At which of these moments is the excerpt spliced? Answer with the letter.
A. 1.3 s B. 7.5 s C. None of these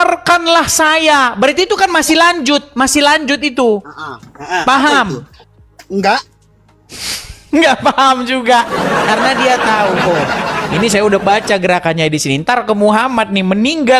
C